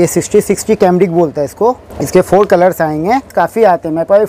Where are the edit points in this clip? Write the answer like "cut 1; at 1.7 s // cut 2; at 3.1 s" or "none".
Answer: cut 1; at 1.9 s // cut 2; at 3.3 s